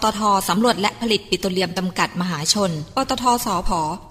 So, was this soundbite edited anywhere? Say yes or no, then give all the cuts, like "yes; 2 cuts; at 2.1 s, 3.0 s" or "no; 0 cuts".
no; 0 cuts